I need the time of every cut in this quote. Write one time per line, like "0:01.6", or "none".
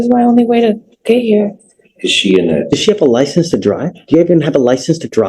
none